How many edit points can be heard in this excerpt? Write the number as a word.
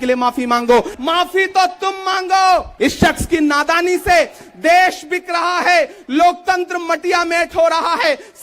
two